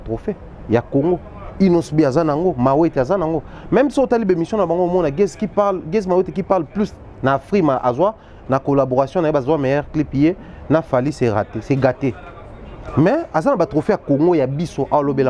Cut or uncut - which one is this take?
uncut